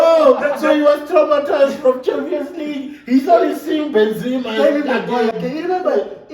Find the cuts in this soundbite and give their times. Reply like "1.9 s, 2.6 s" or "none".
none